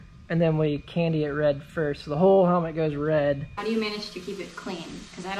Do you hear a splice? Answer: yes; 1 cut; at 3.6 s

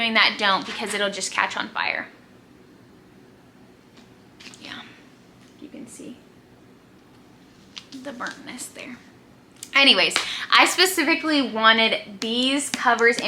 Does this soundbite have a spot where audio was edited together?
no; 0 cuts

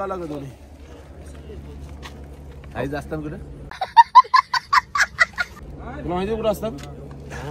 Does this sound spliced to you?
no; 0 cuts

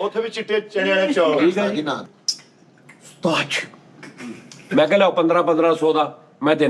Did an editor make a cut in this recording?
yes; 1 cut; at 2.0 s

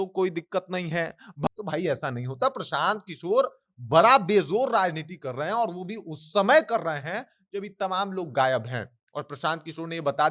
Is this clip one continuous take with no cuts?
no; 1 cut; at 1.5 s

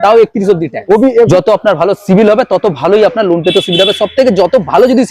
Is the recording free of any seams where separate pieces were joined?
no; 1 cut; at 1.3 s

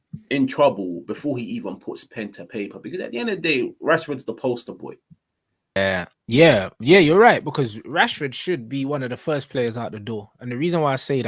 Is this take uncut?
no; 1 cut; at 5.8 s

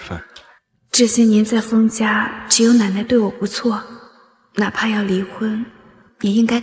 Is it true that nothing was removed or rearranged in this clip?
yes; 0 cuts

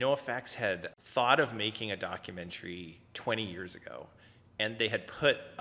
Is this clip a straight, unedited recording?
no; 1 cut; at 0.9 s

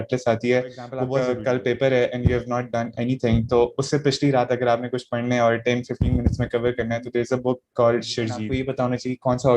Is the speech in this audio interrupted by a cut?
yes; 2 cuts; at 1.0 s, 8.4 s

